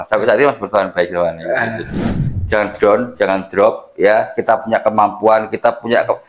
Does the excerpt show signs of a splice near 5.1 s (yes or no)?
no